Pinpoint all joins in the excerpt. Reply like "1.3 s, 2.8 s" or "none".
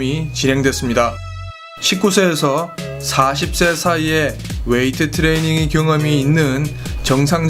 5.5 s